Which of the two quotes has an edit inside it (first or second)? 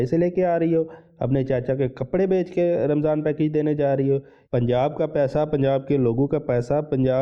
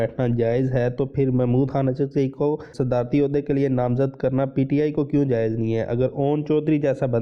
first